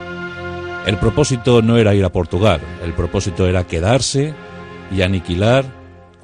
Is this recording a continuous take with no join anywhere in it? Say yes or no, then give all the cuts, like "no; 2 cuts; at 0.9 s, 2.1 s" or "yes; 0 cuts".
yes; 0 cuts